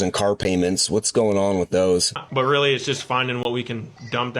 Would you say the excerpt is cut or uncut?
cut